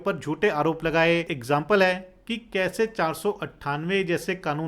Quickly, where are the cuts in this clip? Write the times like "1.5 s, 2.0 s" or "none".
1.3 s